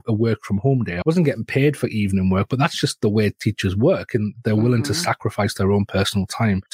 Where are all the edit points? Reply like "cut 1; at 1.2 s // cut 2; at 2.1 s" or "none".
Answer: cut 1; at 1.0 s